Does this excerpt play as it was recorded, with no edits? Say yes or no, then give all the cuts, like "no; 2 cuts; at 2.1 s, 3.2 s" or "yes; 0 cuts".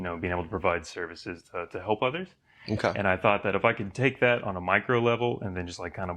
yes; 0 cuts